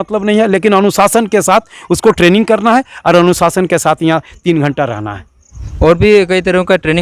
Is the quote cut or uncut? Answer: uncut